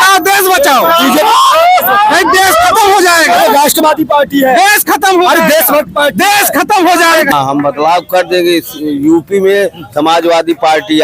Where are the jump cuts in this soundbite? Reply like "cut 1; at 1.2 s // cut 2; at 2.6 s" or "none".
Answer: cut 1; at 7.3 s